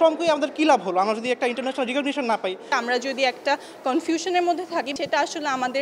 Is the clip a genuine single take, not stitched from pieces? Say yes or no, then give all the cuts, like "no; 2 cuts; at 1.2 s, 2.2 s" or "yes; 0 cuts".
yes; 0 cuts